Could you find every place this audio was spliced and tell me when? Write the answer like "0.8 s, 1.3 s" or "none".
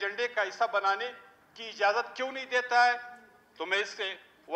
none